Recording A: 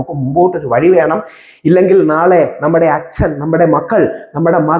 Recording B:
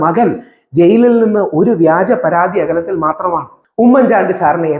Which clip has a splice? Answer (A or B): B